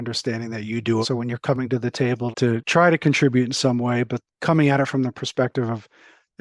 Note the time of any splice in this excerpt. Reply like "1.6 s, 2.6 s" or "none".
1.0 s, 2.4 s, 4.3 s